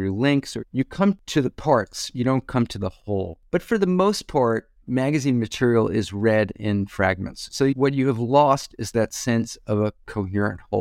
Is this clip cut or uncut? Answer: cut